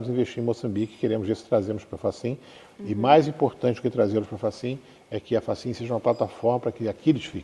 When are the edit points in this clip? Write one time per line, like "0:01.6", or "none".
none